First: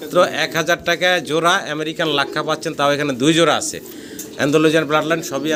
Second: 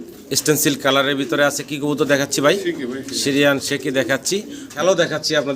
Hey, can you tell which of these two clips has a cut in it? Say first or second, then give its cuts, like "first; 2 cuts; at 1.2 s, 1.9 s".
second; 1 cut; at 4.6 s